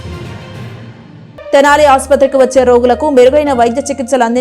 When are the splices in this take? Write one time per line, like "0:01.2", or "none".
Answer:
0:01.5

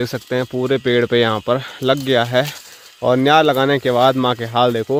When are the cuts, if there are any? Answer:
none

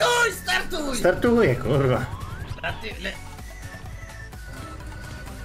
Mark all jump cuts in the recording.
0:04.4

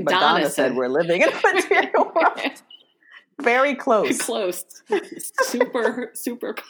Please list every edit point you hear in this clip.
0:05.7

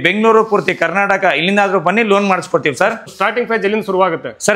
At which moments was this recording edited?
0:03.1

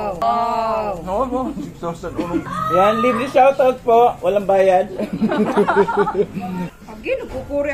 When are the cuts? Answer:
0:00.9
0:02.4
0:06.7

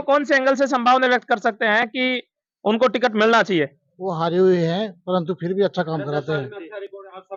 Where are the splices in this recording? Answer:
none

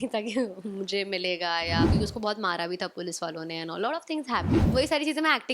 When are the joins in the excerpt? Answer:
0:01.9
0:04.7

